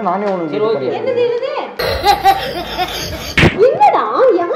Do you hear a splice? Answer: yes; 1 cut; at 3.4 s

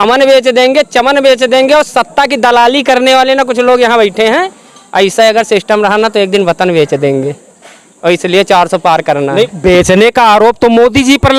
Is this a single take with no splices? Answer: yes; 0 cuts

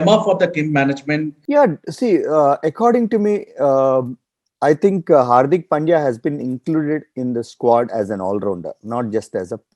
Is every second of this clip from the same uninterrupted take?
no; 1 cut; at 1.3 s

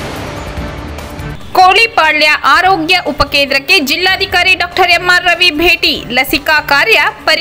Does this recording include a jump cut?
yes; 1 cut; at 1.3 s

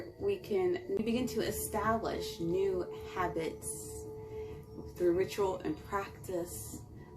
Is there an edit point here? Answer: yes; 1 cut; at 1.0 s

